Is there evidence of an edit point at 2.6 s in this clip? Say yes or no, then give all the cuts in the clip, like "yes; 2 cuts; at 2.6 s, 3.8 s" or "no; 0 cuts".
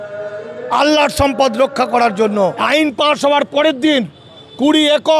yes; 1 cut; at 2.6 s